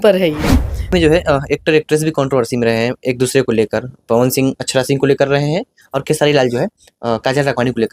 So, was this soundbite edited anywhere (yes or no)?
yes